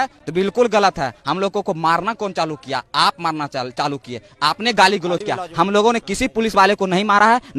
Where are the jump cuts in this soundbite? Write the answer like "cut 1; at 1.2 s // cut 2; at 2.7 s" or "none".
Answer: none